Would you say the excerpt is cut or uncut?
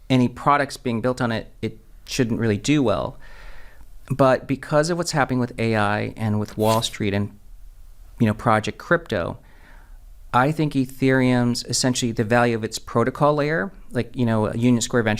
uncut